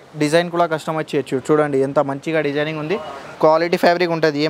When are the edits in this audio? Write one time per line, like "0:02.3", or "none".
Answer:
0:03.3